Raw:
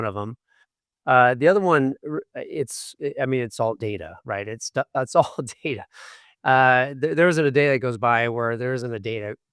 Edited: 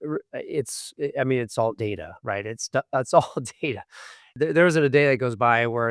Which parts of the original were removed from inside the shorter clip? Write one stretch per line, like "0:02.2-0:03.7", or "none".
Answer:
0:06.3-0:06.9